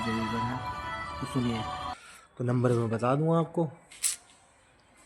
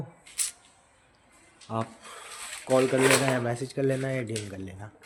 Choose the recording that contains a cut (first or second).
first